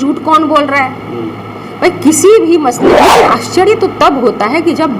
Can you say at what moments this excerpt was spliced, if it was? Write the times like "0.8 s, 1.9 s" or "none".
2.8 s

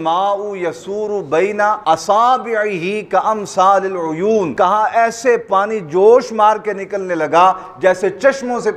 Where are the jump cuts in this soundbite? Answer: 1.8 s, 4.5 s

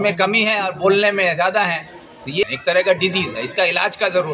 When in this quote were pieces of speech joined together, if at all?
2.4 s

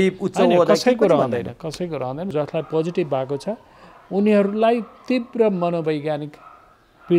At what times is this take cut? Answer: 2.3 s

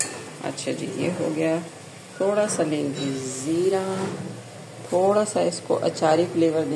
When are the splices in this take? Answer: none

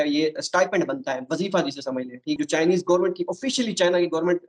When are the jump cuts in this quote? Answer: 2.4 s

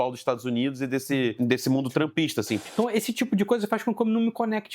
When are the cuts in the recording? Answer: 2.7 s

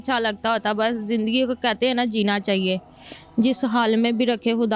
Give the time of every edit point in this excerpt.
none

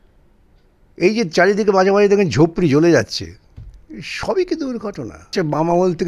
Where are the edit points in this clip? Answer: 5.1 s

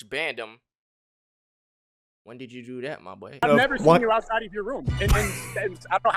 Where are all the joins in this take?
3.4 s

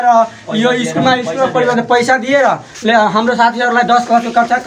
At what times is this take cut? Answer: none

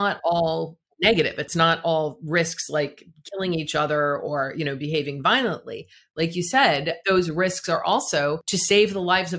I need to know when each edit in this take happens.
7.0 s, 8.5 s

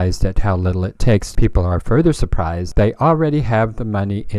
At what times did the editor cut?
1.3 s, 2.7 s

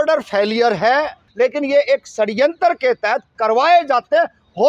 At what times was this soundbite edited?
1.2 s

